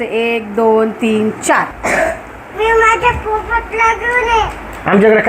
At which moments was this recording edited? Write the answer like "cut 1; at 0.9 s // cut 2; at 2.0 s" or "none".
cut 1; at 1.8 s